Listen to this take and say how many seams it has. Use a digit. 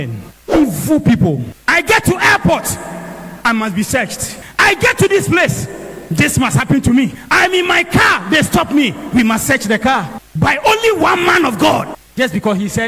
2